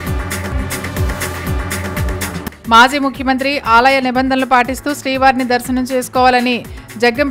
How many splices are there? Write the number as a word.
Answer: one